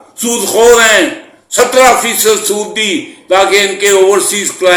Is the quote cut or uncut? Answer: uncut